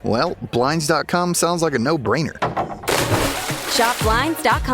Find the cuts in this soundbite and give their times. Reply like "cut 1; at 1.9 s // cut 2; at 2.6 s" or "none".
cut 1; at 2.0 s // cut 2; at 3.6 s